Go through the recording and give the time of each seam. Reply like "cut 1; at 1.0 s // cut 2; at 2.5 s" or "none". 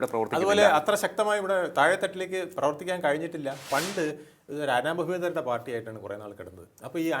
cut 1; at 3.7 s